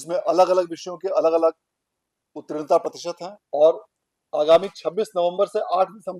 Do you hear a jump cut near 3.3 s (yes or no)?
yes